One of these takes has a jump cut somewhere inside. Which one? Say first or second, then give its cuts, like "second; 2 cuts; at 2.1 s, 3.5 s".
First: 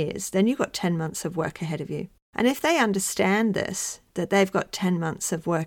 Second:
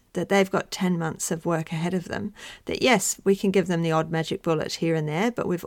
first; 1 cut; at 2.2 s